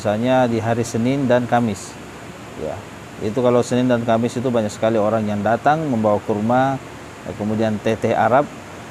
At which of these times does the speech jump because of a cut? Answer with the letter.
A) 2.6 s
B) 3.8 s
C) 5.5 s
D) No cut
D